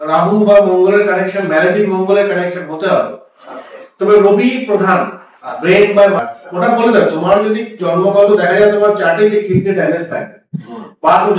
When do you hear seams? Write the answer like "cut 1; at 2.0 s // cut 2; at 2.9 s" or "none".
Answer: cut 1; at 6.2 s